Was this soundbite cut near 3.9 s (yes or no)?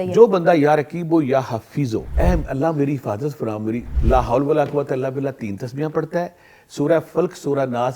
yes